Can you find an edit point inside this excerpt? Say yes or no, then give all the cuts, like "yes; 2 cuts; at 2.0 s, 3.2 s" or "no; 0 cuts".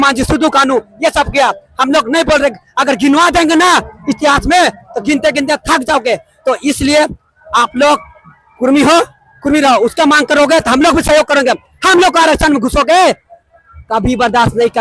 no; 0 cuts